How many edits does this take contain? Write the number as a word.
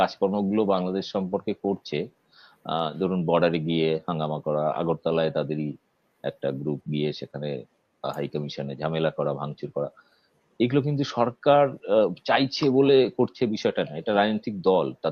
zero